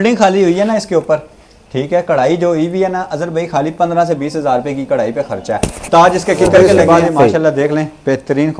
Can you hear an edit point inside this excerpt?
yes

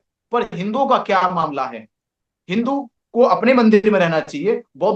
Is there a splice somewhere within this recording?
no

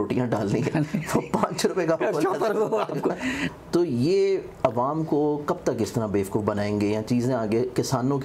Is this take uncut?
no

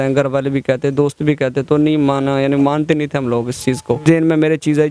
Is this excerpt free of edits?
no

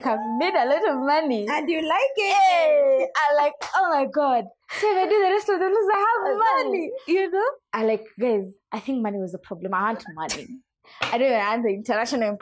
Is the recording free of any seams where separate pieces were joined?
yes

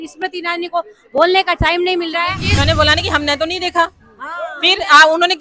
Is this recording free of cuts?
no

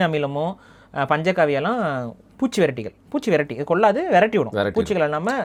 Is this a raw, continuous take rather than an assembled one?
yes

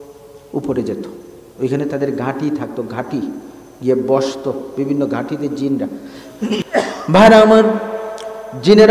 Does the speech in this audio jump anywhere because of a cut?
yes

